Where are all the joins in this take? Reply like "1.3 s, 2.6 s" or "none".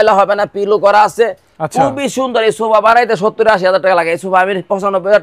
none